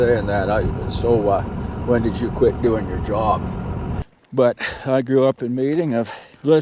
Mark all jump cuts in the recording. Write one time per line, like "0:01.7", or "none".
0:04.0